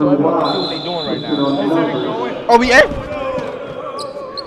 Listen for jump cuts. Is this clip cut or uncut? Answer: uncut